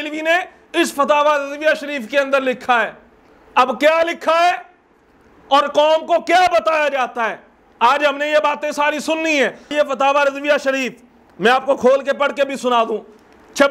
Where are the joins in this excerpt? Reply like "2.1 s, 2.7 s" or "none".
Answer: 9.7 s